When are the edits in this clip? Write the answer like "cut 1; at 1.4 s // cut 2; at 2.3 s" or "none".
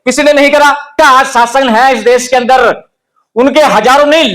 cut 1; at 1.0 s